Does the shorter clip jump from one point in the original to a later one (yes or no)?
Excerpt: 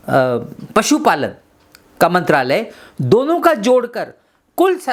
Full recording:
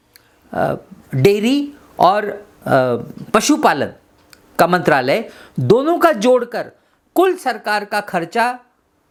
no